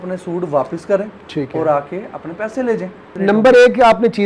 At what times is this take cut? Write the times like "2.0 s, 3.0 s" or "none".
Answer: 3.1 s

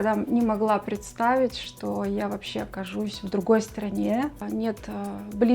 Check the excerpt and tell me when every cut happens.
4.4 s

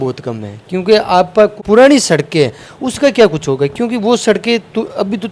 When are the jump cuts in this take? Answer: 1.5 s

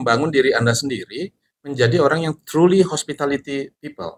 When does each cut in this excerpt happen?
none

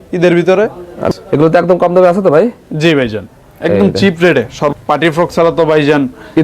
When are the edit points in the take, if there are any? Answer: 1.0 s, 4.7 s

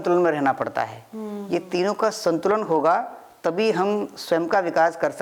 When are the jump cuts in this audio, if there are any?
none

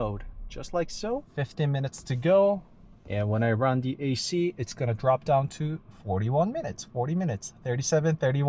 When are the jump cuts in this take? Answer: 1.3 s

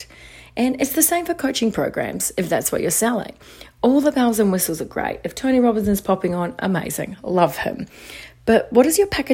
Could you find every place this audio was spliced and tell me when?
none

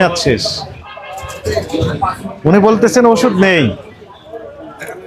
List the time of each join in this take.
none

